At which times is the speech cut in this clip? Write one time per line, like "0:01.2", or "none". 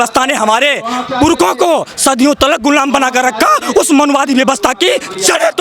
none

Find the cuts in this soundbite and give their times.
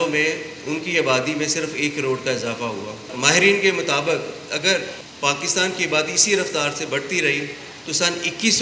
0:03.1
0:05.0

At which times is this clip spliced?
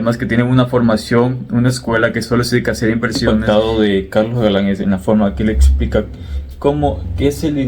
0:03.4

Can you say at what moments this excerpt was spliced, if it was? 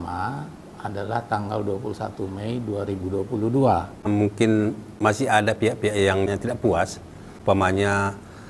0:03.9

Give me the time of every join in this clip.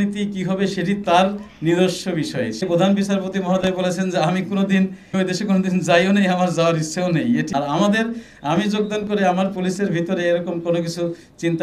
0:02.6
0:05.1
0:07.5

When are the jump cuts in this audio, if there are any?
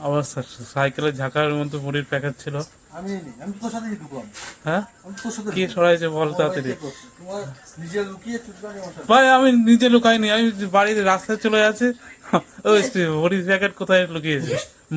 none

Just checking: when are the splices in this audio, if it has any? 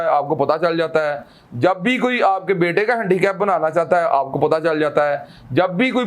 none

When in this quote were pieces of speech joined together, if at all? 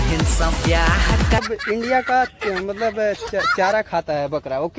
0:01.4

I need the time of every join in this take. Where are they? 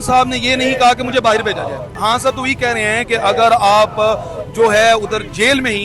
0:01.9

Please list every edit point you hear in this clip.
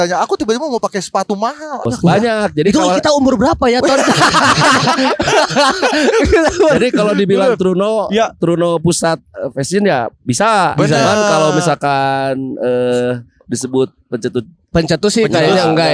0:01.8

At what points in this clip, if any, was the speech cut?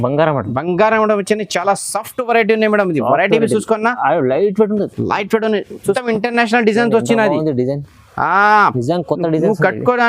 0:06.0

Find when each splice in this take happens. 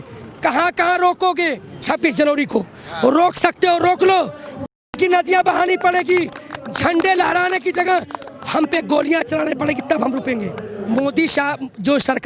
0:01.7
0:10.7

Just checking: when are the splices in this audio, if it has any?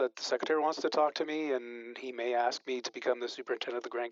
none

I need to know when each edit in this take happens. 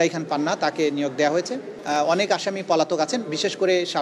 0:01.8

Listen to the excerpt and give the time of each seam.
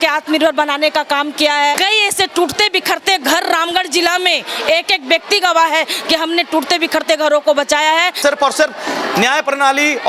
0:01.8
0:08.2

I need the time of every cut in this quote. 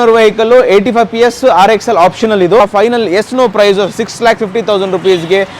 0:02.6

